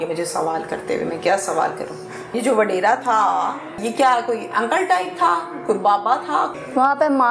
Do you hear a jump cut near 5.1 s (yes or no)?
no